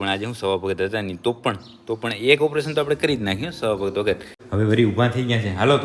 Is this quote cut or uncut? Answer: cut